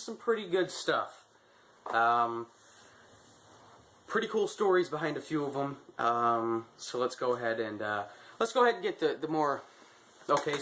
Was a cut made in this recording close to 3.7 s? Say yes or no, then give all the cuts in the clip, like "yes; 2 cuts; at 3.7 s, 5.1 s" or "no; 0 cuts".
no; 1 cut; at 5.4 s